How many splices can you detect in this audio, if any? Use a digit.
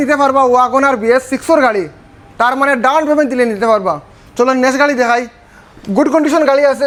0